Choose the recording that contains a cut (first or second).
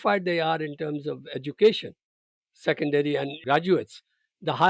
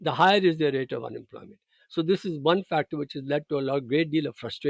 first